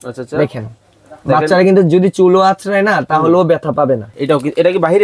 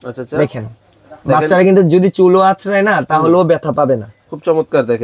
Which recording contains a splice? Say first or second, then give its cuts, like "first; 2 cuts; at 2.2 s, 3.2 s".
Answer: first; 1 cut; at 4.1 s